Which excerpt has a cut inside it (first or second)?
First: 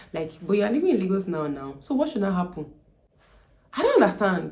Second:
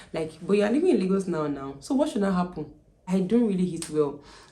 second